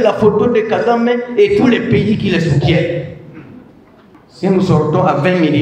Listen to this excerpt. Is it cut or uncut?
uncut